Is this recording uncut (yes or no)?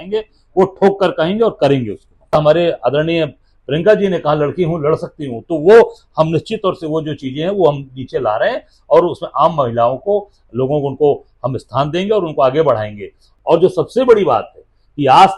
no